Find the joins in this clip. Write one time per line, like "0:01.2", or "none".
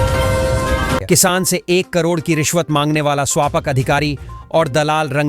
0:01.0